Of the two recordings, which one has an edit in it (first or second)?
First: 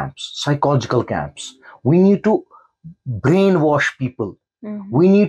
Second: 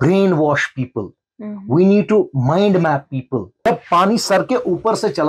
second